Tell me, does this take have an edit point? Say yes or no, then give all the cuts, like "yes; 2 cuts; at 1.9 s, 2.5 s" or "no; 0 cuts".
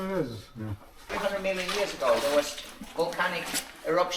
yes; 1 cut; at 1.1 s